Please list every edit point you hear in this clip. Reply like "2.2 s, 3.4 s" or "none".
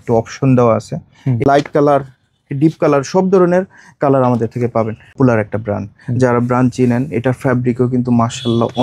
1.4 s, 5.2 s